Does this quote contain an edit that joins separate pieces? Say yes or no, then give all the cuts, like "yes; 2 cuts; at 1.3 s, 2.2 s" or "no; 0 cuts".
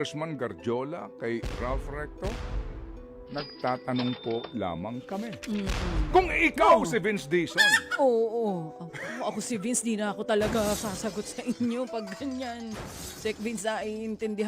no; 0 cuts